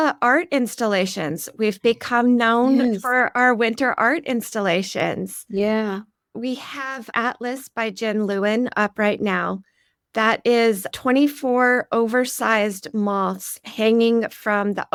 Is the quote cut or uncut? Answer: uncut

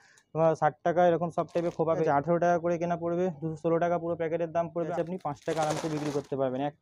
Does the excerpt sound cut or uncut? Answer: cut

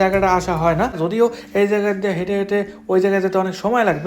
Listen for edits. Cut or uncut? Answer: cut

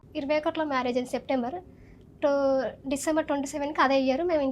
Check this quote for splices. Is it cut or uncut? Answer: uncut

